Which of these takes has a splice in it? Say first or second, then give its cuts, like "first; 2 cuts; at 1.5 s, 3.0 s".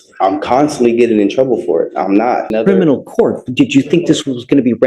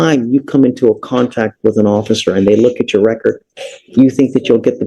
first; 1 cut; at 2.5 s